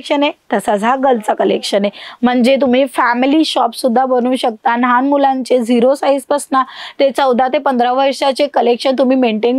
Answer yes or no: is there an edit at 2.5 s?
no